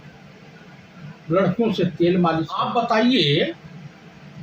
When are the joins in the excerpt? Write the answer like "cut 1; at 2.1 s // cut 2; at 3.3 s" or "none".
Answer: cut 1; at 2.6 s